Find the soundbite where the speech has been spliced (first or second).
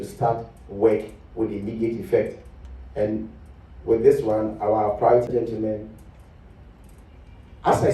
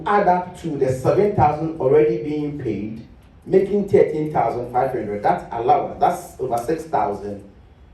first